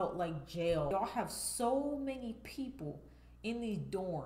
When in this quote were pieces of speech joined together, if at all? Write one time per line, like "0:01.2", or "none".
0:00.9